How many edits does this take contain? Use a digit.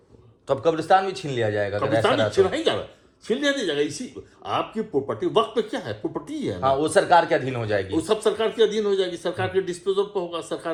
0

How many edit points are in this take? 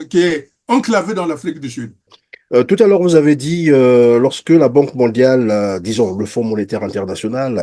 1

